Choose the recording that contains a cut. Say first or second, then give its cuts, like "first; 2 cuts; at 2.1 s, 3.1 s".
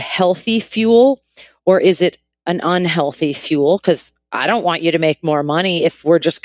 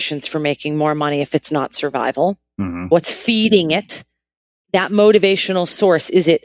second; 1 cut; at 4.7 s